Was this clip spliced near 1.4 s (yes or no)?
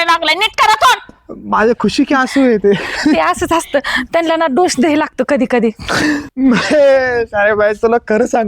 no